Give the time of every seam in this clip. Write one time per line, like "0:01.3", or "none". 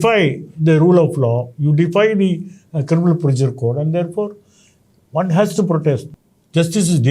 0:06.1